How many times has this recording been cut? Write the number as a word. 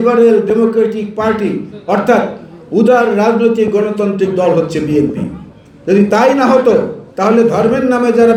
zero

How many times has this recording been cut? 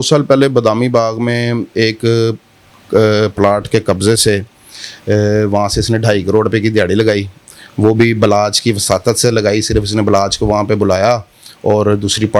zero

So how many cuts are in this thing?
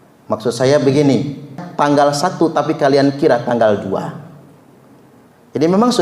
one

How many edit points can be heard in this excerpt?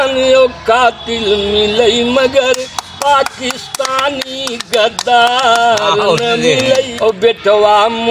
one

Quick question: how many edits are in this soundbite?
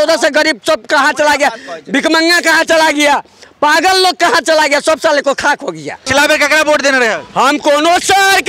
one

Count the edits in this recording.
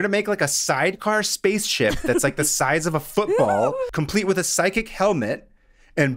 one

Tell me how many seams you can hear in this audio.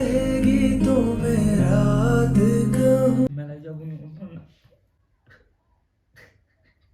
one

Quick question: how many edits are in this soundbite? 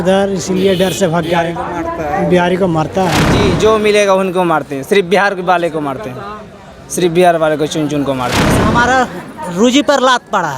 two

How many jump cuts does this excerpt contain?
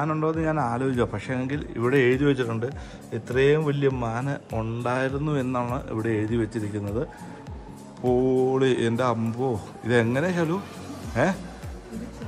zero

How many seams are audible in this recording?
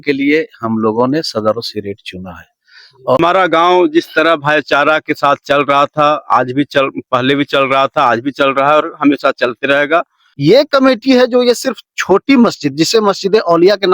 two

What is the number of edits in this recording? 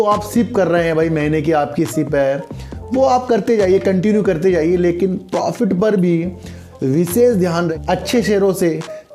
one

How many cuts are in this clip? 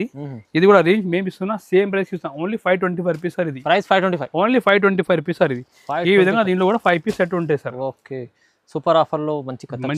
zero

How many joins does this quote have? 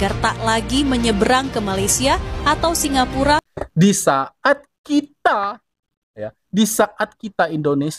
one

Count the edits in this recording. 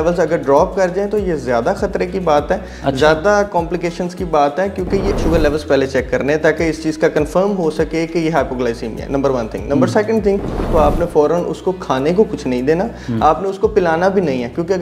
two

